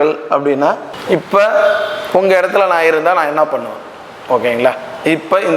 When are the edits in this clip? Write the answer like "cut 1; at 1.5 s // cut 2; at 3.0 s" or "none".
cut 1; at 0.9 s